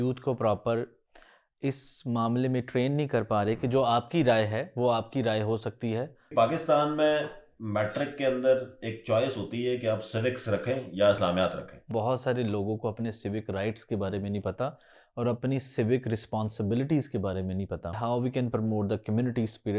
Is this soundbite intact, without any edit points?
no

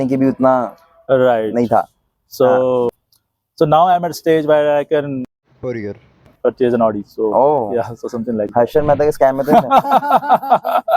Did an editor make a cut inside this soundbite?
no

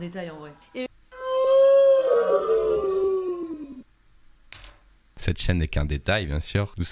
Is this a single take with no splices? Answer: no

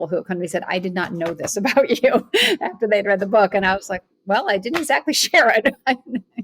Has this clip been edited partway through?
no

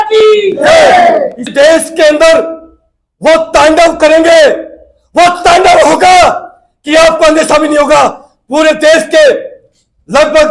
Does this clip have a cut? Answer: yes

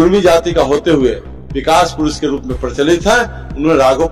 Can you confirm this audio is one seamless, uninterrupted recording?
yes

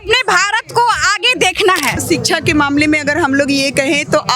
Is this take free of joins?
no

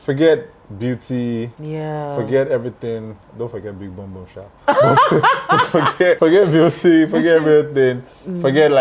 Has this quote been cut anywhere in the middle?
yes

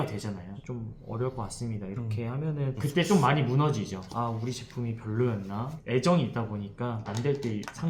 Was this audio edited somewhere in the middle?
no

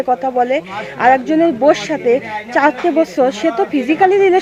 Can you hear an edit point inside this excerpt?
no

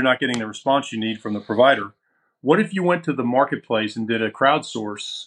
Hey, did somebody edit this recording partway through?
no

